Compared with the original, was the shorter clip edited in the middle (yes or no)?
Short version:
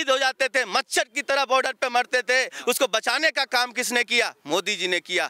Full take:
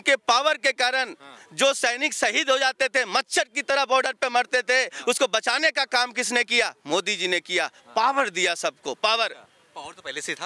no